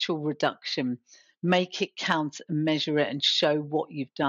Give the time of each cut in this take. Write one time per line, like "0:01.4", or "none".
none